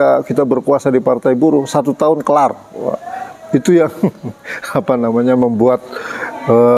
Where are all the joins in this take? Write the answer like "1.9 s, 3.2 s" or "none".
none